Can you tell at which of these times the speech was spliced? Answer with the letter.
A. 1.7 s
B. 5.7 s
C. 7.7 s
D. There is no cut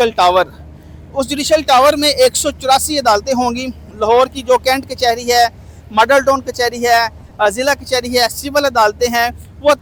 D